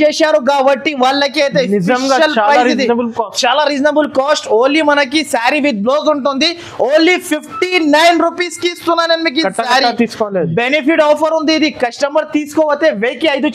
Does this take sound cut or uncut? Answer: uncut